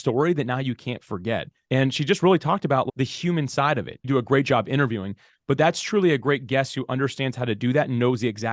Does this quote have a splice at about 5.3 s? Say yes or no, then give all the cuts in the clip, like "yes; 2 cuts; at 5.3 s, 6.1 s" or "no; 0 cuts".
no; 3 cuts; at 1.5 s, 2.9 s, 4.1 s